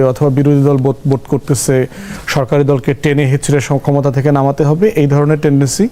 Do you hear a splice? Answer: no; 0 cuts

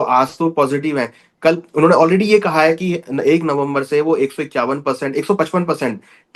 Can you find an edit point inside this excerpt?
no; 0 cuts

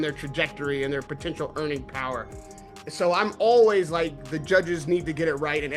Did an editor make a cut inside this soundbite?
no; 0 cuts

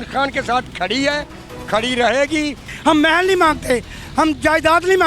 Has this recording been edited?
yes; 1 cut; at 2.7 s

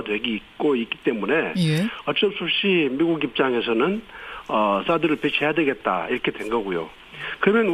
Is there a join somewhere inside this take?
yes; 1 cut; at 3.9 s

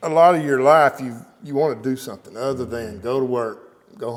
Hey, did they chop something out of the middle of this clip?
no; 0 cuts

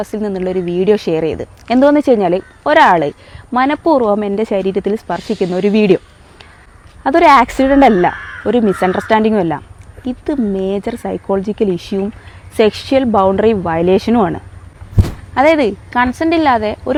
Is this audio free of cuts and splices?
yes; 0 cuts

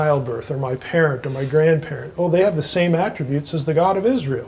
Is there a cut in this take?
no; 0 cuts

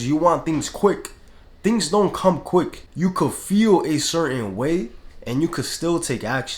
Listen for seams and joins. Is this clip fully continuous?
no; 1 cut; at 2.8 s

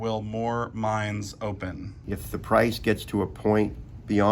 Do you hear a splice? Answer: yes; 1 cut; at 2.0 s

